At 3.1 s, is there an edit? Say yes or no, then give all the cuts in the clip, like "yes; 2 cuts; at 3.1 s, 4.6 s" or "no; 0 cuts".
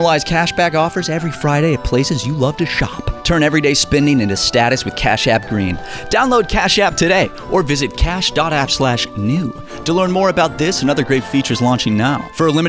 yes; 1 cut; at 3.1 s